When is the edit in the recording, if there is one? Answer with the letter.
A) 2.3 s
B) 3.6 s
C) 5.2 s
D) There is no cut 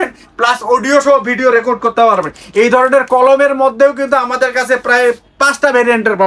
D